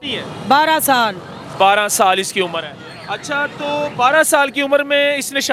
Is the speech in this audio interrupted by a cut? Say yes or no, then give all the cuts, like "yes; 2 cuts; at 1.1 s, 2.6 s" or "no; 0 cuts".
no; 0 cuts